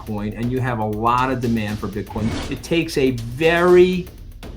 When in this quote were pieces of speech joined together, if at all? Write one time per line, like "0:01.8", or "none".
0:02.3